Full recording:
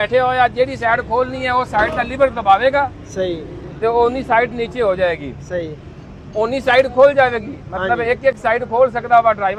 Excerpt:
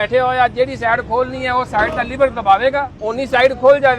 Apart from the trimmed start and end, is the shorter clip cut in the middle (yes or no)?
yes